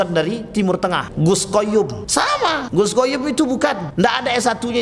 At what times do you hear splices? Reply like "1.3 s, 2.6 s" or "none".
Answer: 1.1 s, 2.3 s, 3.8 s

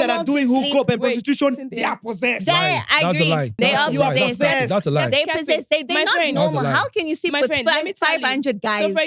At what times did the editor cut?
3.6 s

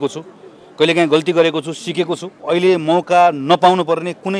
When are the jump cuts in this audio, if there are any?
2.3 s

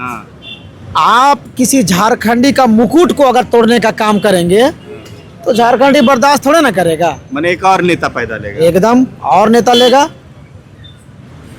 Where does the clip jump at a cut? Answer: none

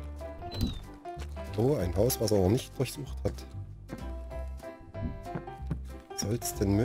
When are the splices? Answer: none

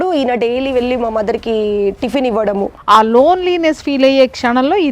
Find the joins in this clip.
2.8 s

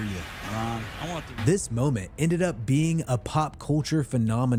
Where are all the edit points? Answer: none

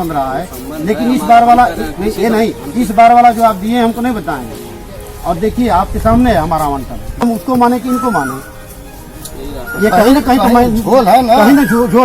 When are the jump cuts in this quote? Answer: 7.2 s

